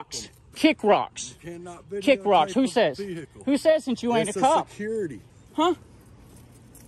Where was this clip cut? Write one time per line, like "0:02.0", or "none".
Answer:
0:05.2